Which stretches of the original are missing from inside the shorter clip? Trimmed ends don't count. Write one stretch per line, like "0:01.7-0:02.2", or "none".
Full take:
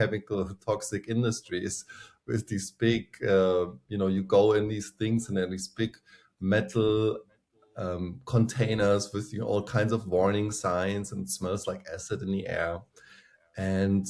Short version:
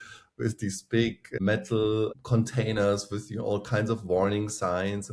0:03.1-0:06.3
0:07.2-0:08.2